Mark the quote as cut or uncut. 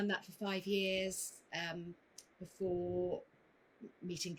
uncut